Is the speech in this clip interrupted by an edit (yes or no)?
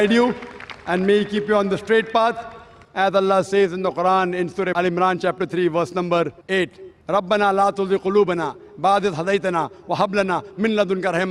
no